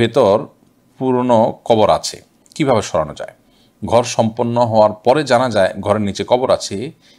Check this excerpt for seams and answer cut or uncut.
uncut